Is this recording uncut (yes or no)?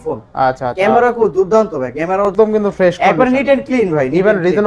no